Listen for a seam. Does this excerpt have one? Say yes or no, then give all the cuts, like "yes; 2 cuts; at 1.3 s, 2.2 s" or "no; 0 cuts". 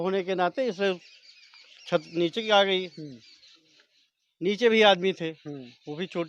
no; 0 cuts